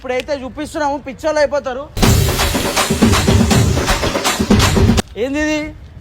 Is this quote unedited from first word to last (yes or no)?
no